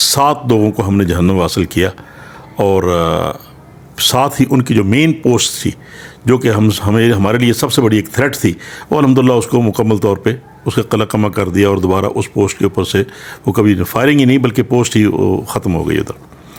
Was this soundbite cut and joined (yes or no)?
no